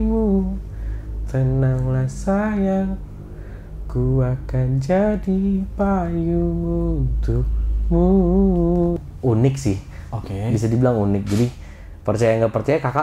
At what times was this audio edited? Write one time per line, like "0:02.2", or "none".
0:09.0